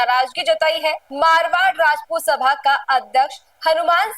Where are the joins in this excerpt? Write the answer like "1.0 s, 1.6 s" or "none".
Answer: none